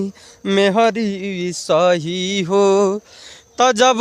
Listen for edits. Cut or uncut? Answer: uncut